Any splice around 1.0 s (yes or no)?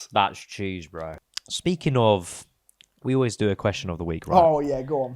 yes